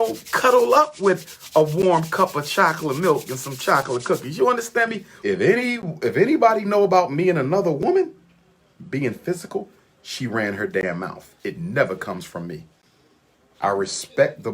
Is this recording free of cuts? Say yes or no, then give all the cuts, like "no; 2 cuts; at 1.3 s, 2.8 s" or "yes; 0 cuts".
no; 1 cut; at 5.1 s